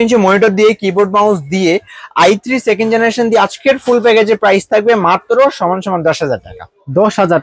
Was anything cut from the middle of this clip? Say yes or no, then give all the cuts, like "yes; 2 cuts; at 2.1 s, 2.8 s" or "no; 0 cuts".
no; 0 cuts